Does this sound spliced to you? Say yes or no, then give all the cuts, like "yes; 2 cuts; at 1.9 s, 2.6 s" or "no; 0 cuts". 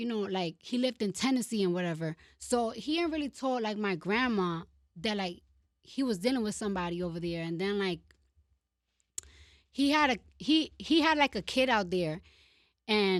no; 0 cuts